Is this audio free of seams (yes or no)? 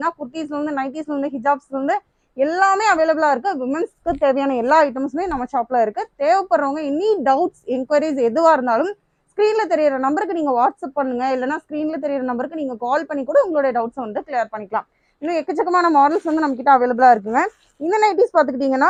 yes